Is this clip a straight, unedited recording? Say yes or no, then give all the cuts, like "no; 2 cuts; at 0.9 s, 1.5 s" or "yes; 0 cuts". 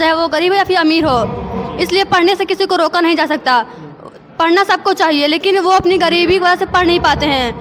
yes; 0 cuts